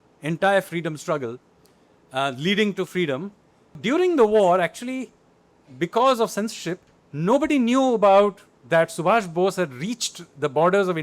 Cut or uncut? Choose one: cut